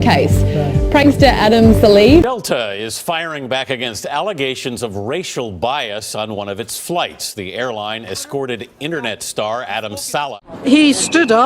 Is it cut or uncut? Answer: cut